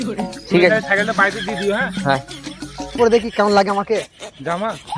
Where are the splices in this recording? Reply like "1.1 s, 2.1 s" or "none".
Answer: 3.0 s